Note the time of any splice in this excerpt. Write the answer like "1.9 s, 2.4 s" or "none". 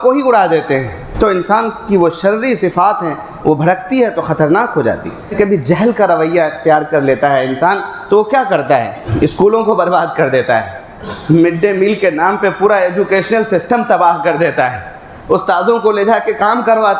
1.0 s, 5.3 s, 9.0 s